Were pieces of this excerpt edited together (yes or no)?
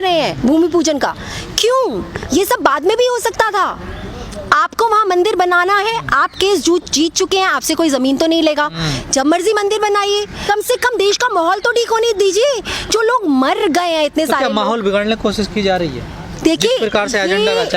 no